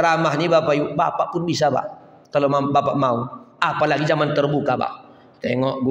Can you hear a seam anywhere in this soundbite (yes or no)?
no